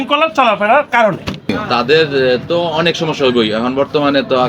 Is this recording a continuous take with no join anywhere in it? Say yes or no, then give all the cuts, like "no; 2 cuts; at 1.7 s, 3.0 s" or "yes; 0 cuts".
no; 1 cut; at 1.6 s